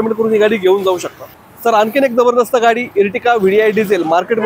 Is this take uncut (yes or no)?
yes